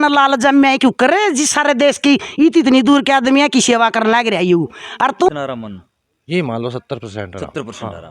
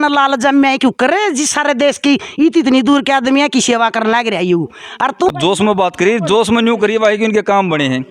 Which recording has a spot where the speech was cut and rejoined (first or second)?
first